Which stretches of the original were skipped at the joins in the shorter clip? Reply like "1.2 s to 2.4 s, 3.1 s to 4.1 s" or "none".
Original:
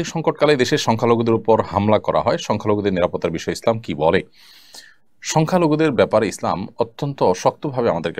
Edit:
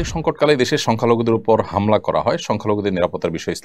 none